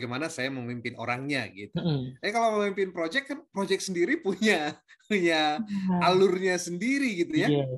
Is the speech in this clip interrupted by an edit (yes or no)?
no